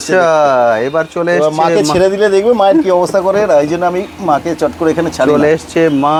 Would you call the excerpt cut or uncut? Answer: uncut